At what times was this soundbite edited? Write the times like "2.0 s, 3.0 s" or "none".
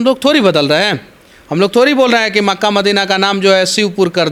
none